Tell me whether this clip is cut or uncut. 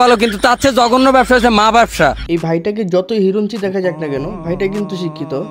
uncut